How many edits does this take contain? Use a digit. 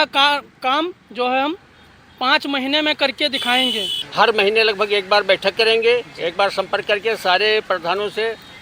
1